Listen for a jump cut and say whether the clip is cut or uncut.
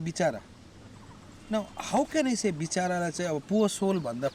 uncut